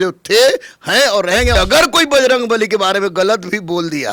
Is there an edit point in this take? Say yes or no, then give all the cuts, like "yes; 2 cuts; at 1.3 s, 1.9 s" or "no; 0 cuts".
yes; 1 cut; at 1.5 s